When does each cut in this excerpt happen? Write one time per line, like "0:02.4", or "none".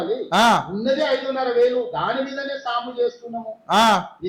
none

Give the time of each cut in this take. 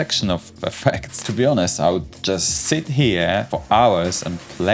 0:01.2
0:03.5

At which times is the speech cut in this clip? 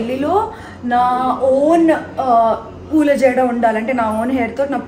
none

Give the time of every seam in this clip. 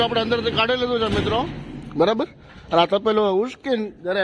none

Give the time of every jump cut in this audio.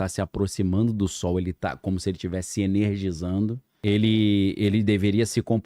0:03.7

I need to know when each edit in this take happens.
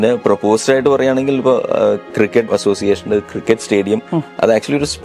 0:02.4

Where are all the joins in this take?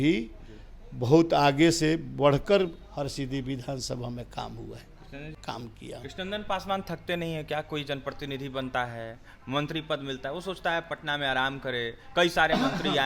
0:05.3

